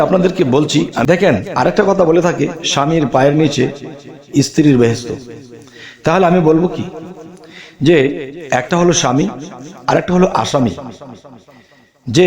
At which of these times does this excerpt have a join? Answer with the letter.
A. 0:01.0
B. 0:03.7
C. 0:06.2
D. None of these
A